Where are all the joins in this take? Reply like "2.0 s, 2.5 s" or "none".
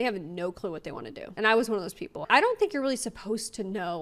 1.3 s